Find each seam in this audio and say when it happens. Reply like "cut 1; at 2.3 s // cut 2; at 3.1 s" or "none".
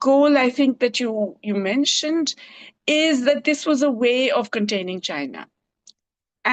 none